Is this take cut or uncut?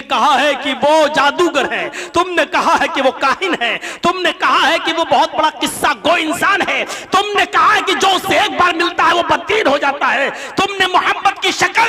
uncut